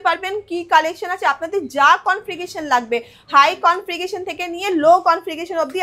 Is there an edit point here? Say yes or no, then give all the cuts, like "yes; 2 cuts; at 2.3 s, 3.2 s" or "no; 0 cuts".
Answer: no; 0 cuts